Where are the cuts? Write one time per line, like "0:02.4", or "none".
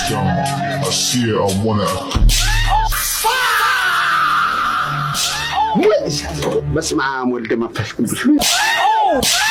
none